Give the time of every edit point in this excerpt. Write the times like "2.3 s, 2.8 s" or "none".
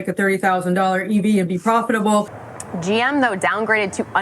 2.3 s